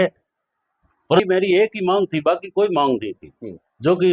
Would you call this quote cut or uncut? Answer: cut